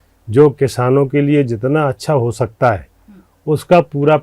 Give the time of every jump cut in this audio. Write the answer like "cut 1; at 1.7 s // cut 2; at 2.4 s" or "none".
none